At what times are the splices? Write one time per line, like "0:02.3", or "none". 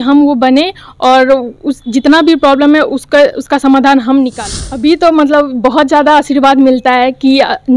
0:04.4